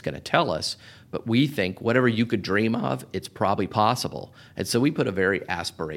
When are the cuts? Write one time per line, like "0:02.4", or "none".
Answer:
0:01.7
0:03.6

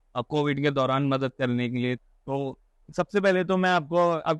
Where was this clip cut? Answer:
0:02.1

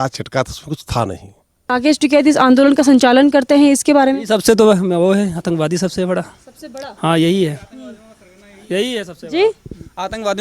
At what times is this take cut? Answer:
0:01.7

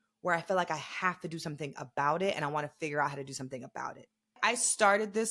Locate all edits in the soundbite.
0:04.4

